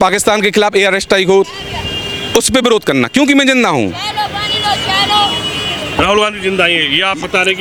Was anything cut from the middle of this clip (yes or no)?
no